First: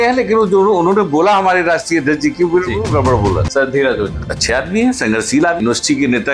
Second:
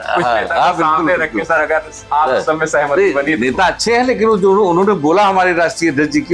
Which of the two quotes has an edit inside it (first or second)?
first